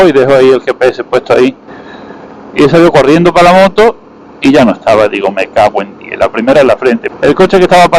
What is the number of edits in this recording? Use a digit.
1